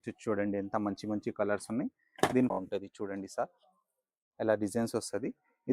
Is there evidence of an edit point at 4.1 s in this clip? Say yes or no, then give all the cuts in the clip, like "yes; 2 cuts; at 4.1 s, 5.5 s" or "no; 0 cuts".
no; 1 cut; at 2.6 s